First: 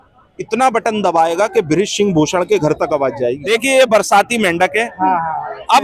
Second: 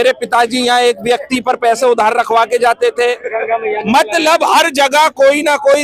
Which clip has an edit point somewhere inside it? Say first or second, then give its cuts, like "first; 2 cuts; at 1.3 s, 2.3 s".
first; 1 cut; at 3.4 s